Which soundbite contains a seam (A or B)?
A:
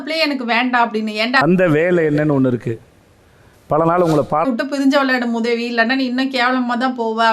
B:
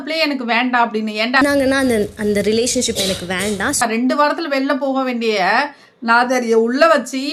A